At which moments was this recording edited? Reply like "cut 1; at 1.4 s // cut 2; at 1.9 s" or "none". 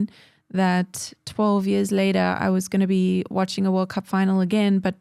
none